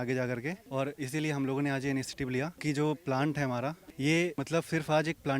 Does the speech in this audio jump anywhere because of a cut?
yes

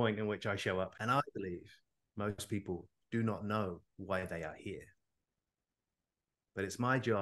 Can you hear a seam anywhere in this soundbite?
yes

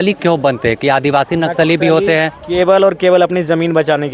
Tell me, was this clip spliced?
no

